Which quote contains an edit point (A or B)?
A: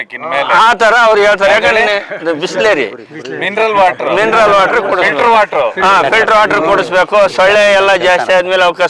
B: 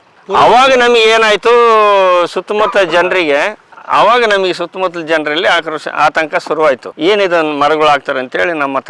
B